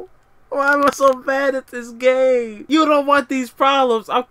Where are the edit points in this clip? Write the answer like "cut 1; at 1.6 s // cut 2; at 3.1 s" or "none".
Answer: cut 1; at 2.6 s